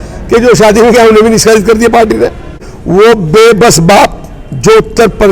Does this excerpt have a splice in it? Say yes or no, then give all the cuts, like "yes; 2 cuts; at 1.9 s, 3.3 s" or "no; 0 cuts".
yes; 1 cut; at 2.4 s